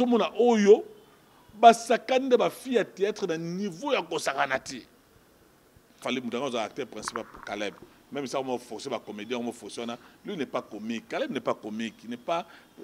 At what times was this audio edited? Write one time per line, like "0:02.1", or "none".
0:06.0